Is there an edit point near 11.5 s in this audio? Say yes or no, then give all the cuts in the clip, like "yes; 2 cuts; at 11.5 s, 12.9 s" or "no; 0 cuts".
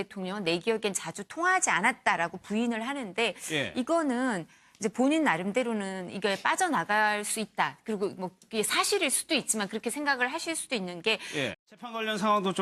no; 0 cuts